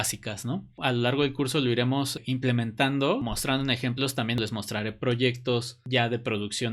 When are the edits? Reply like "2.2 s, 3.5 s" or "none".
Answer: 0.8 s, 3.3 s, 4.4 s

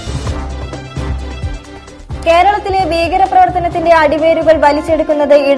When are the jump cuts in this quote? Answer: 1.6 s

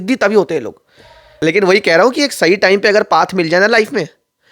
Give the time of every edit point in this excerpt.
1.2 s

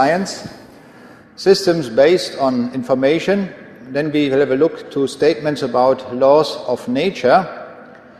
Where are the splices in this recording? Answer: 4.8 s

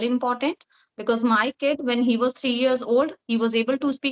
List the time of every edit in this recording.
none

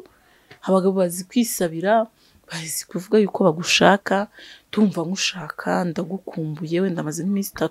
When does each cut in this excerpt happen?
none

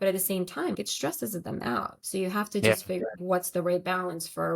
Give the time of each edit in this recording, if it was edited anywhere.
0.8 s, 2.0 s, 3.2 s

